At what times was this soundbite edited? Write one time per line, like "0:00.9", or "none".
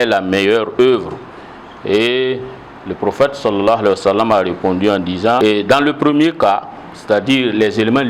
0:05.4